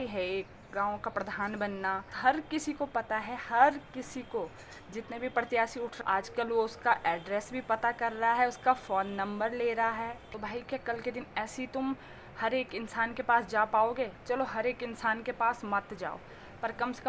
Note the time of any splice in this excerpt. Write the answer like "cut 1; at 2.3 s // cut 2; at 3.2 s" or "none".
cut 1; at 2.1 s // cut 2; at 6.0 s // cut 3; at 10.3 s